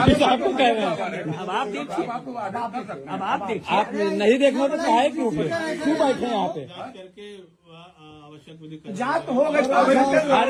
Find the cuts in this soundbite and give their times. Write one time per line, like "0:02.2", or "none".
none